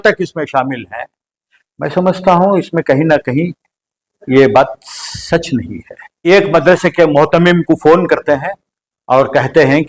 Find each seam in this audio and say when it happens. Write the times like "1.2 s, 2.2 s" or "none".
6.3 s